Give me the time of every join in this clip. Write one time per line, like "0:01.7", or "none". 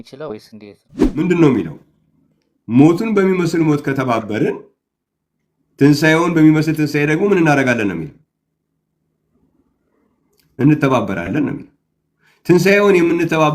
0:01.2